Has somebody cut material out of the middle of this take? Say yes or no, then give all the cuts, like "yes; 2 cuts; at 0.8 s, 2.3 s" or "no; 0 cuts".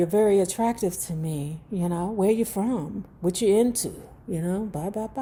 no; 0 cuts